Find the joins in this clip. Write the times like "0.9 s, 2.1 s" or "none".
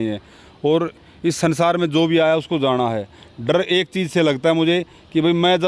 none